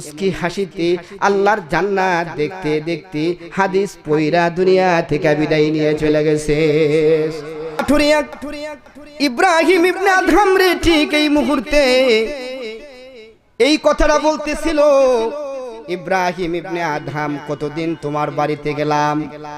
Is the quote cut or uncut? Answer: cut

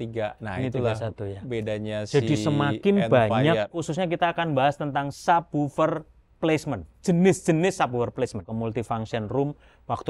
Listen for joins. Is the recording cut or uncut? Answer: cut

